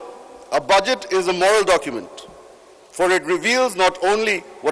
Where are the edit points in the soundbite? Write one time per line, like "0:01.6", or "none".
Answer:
none